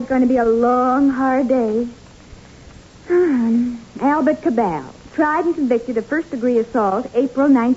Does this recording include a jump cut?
yes; 1 cut; at 6.5 s

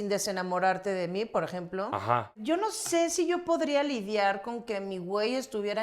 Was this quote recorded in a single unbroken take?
no; 1 cut; at 2.3 s

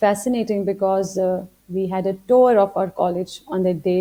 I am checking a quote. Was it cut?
no; 0 cuts

